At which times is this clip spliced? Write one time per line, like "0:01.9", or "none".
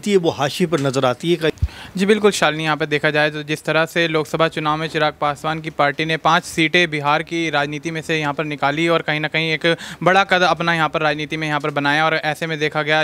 0:01.5